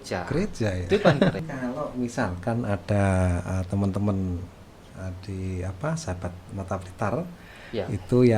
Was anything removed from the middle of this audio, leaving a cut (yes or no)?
yes